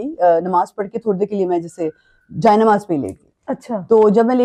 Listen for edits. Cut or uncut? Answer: uncut